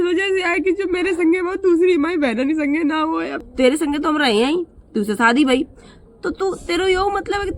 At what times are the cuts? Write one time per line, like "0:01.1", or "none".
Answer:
0:03.3

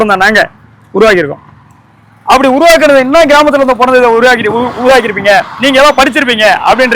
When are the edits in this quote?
none

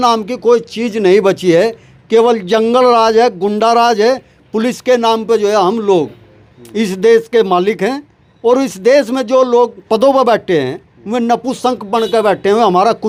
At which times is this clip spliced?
none

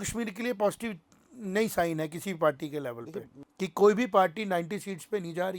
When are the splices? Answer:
0:03.3

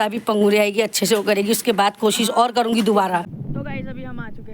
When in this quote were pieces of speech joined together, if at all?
0:03.3

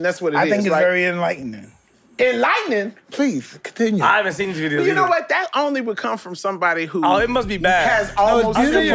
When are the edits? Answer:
none

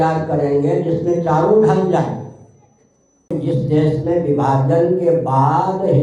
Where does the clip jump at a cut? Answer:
0:03.3

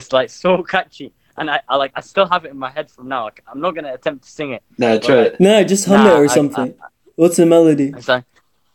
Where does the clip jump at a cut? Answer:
none

